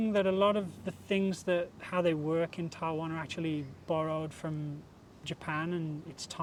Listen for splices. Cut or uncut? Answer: uncut